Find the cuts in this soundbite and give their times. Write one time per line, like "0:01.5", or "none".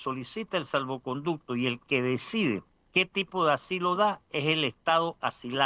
0:02.7